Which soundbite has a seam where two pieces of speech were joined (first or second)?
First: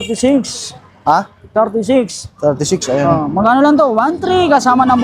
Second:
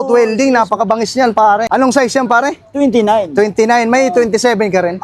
second